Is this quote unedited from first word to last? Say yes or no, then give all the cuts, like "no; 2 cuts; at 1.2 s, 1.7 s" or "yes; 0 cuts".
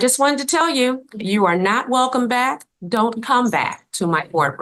yes; 0 cuts